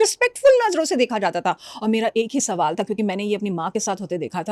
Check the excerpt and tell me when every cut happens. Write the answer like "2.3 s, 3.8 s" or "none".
none